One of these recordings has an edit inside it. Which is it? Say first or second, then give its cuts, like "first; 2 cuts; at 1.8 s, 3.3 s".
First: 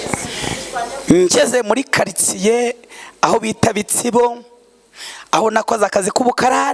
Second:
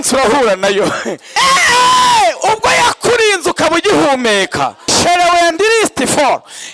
second; 2 cuts; at 1.2 s, 4.8 s